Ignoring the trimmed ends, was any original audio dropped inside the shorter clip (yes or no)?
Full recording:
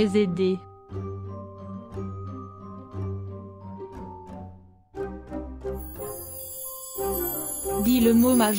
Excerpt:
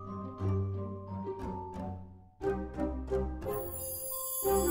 no